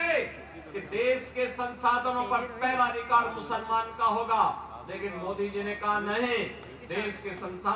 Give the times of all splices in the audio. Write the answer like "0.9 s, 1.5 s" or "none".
none